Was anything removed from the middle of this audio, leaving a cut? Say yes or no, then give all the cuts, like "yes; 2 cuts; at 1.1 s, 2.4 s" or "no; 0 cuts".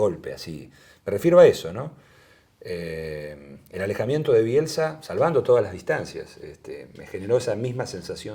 no; 0 cuts